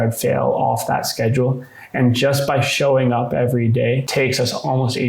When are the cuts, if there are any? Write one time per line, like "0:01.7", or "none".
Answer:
0:04.1